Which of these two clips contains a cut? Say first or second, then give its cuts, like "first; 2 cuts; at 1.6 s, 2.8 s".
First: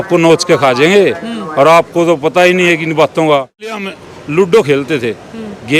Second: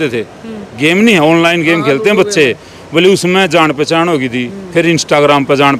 first; 1 cut; at 3.9 s